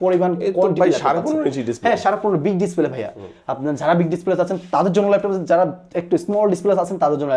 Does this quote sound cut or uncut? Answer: uncut